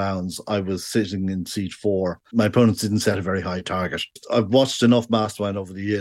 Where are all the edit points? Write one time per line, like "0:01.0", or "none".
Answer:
none